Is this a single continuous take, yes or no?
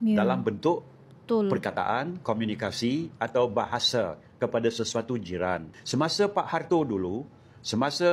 no